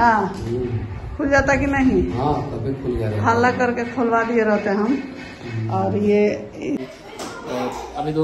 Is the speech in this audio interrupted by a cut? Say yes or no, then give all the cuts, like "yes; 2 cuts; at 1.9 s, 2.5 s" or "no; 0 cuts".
yes; 1 cut; at 6.9 s